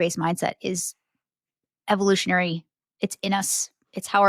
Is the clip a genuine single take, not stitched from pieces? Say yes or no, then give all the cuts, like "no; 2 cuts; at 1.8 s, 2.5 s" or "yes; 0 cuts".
yes; 0 cuts